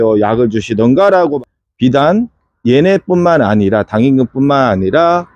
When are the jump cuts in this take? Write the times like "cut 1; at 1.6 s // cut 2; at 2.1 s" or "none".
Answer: cut 1; at 1.4 s